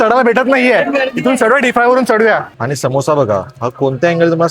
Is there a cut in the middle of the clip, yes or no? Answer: yes